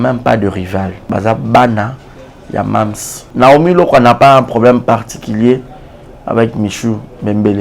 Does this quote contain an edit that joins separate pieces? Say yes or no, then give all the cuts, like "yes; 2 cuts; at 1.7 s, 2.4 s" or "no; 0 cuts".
yes; 2 cuts; at 1.0 s, 3.3 s